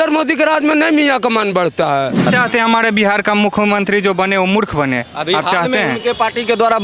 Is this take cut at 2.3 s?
yes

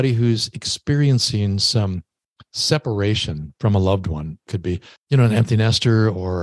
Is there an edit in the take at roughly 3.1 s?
no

